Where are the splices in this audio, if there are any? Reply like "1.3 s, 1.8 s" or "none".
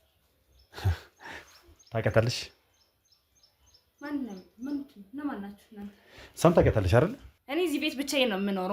7.3 s